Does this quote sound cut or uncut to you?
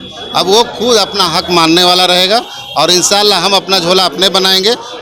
uncut